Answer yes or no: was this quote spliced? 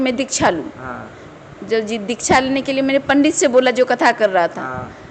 no